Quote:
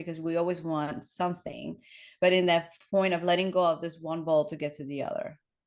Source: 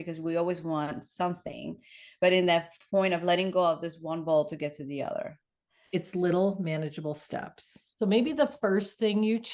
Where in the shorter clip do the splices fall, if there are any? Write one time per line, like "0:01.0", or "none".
none